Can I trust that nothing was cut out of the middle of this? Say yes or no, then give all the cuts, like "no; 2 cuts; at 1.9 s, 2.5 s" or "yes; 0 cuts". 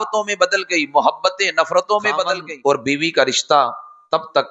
no; 1 cut; at 2.4 s